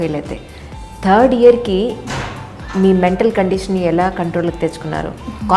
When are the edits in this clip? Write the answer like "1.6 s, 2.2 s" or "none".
none